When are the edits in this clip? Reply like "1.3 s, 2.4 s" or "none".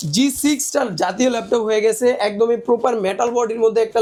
none